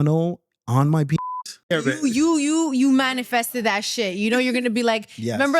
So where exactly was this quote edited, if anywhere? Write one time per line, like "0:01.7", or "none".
0:01.7